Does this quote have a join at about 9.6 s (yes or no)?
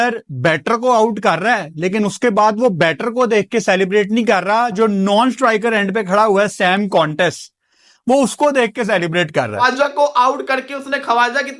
yes